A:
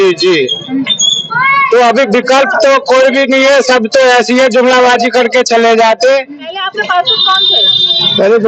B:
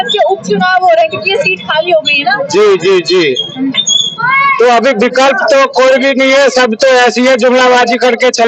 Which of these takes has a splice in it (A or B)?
A